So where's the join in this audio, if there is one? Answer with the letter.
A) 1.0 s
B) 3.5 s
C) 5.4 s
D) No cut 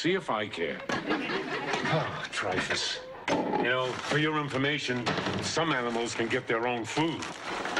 D